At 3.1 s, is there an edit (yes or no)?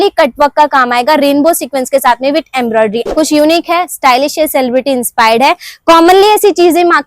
yes